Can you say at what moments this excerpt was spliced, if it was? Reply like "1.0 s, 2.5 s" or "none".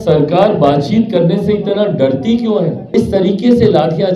2.8 s

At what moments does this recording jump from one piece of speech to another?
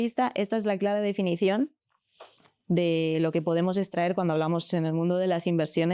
none

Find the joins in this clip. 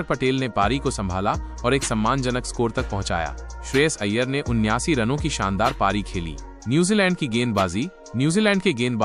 none

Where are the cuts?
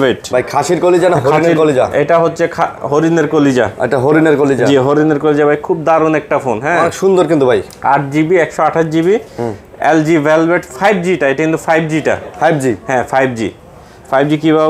none

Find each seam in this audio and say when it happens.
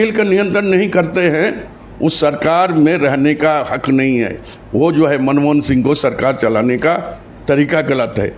none

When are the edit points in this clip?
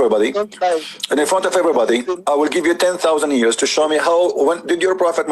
none

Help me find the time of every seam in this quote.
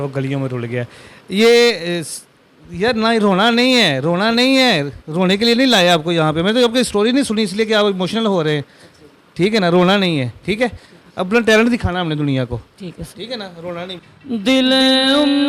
13.9 s

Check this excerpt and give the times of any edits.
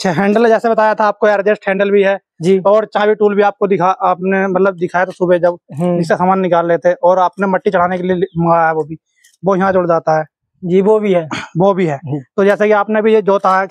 none

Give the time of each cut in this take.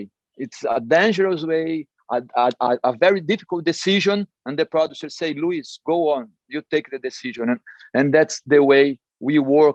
none

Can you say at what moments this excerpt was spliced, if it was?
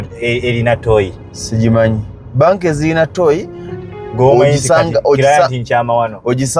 none

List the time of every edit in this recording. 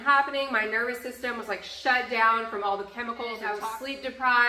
3.6 s

